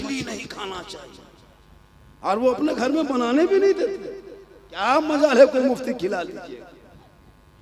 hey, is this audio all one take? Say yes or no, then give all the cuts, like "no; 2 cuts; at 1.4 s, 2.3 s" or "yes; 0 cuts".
yes; 0 cuts